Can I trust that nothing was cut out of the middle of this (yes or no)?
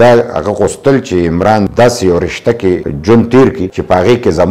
no